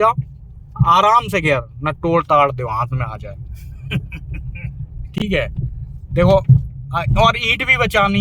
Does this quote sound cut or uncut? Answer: uncut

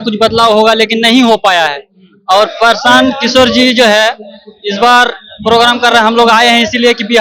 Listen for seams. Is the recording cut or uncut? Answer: uncut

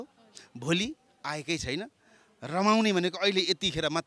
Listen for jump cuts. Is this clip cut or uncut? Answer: uncut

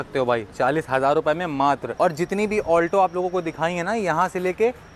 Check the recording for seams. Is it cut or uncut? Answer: cut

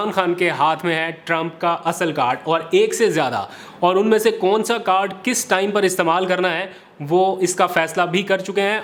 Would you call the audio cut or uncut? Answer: uncut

